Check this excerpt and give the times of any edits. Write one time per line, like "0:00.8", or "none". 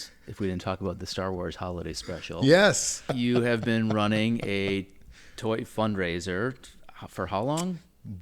0:03.0